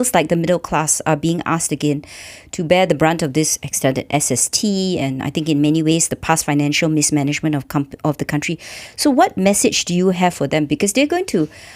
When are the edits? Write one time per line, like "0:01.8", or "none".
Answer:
none